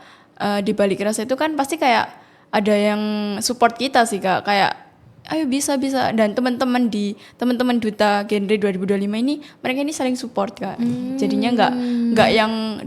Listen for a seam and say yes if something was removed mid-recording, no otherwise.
no